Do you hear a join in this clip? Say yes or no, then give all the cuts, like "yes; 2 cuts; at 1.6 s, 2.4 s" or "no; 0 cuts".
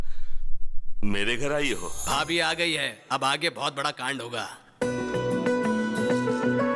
yes; 1 cut; at 1.9 s